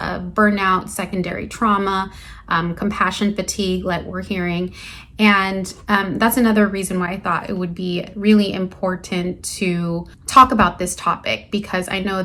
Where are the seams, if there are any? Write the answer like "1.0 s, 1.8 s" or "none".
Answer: none